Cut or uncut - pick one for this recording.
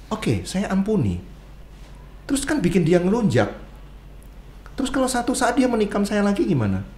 uncut